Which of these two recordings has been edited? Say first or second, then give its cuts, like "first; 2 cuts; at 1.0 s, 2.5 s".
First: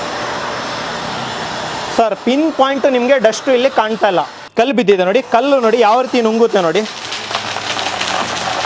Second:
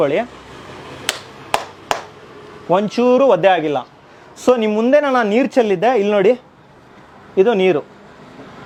first; 1 cut; at 4.4 s